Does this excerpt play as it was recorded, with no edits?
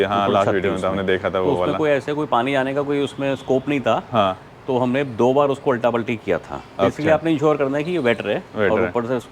yes; 0 cuts

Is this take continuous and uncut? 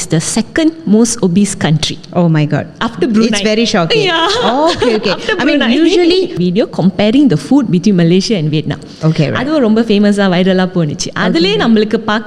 no; 1 cut; at 6.4 s

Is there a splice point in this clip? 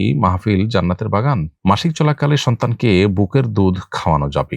yes; 1 cut; at 1.5 s

